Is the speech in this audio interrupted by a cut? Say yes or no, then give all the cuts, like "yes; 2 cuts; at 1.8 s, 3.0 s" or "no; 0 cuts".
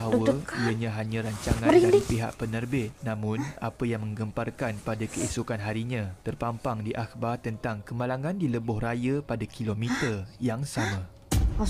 no; 0 cuts